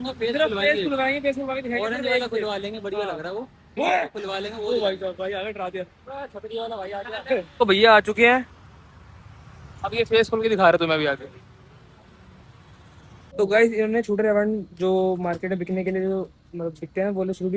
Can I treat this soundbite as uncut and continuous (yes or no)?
no